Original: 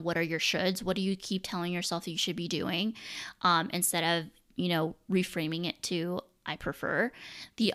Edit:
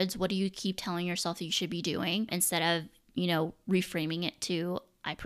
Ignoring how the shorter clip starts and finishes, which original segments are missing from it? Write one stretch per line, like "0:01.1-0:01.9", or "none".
0:03.0-0:03.7